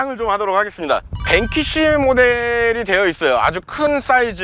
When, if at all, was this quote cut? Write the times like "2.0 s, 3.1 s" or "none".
1.1 s